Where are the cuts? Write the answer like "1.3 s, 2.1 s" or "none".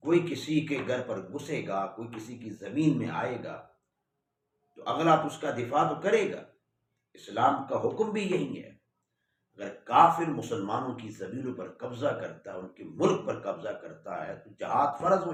none